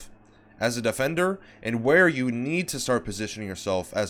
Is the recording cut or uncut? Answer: uncut